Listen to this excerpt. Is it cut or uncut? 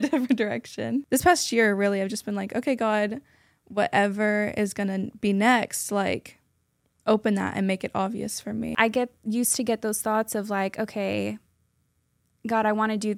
cut